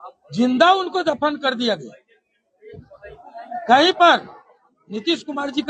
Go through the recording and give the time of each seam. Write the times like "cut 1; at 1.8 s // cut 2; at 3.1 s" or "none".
none